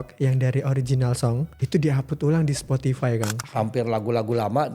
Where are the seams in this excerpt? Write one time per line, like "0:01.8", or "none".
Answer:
0:01.6
0:03.4